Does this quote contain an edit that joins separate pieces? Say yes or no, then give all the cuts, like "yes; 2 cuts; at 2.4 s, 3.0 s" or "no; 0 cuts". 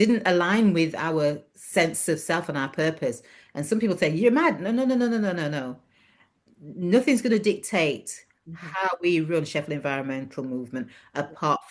no; 0 cuts